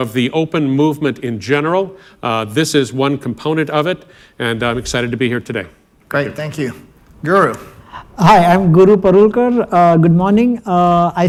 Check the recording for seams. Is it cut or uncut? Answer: uncut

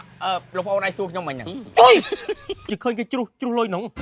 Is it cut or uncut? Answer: cut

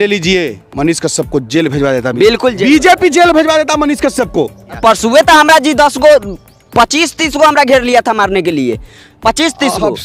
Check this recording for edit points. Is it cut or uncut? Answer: cut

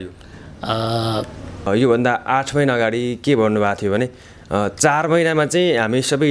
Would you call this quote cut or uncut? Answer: cut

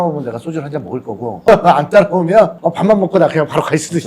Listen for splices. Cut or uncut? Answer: cut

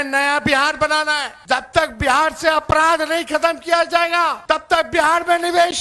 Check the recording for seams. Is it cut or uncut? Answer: cut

